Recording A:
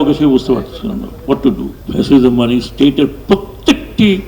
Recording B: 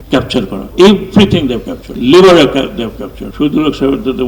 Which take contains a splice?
A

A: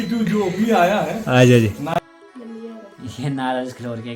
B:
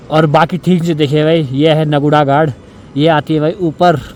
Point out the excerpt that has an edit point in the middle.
A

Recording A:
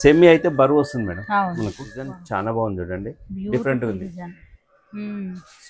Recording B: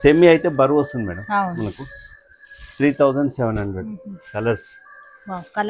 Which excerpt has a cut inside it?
A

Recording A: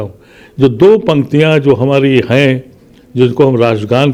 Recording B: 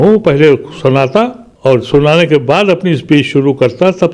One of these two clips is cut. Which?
B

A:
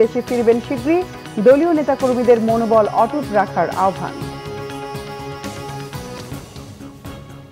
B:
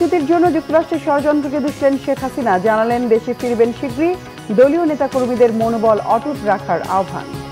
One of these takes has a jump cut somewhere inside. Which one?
A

